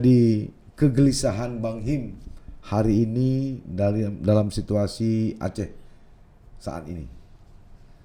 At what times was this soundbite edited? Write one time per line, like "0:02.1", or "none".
none

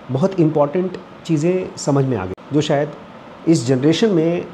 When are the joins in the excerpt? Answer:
0:02.3

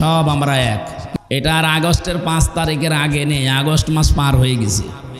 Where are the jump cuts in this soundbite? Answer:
0:01.0

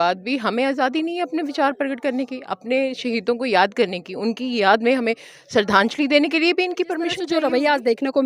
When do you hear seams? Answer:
0:07.3

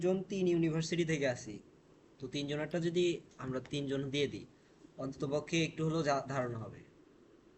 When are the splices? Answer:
none

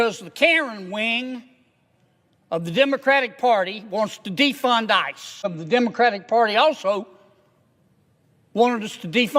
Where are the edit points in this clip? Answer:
0:05.6

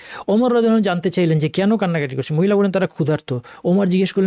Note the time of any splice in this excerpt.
none

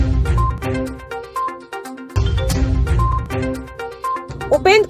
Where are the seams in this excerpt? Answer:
0:01.9

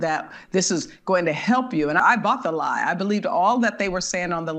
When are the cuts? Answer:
0:02.0

